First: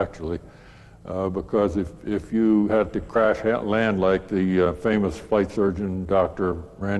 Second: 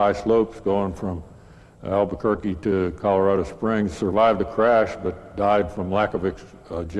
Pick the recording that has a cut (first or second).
first